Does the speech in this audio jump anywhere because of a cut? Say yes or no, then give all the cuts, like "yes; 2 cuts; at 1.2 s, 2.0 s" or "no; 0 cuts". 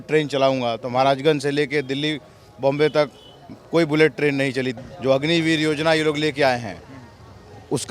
yes; 1 cut; at 4.7 s